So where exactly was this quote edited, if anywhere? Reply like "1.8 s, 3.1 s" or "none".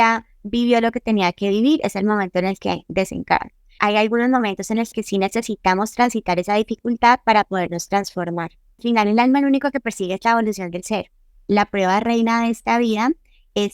3.8 s, 8.8 s, 11.4 s

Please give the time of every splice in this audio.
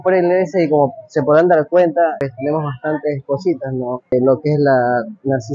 2.2 s, 4.1 s

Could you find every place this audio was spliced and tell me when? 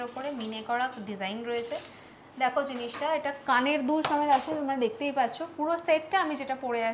none

